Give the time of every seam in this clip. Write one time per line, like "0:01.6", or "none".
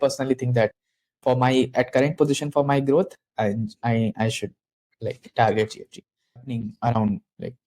0:06.6